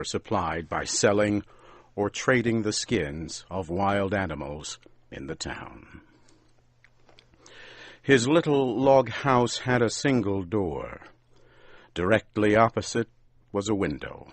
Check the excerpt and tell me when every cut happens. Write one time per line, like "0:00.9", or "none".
0:12.8